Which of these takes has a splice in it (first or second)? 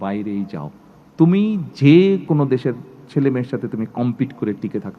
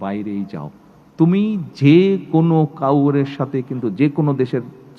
first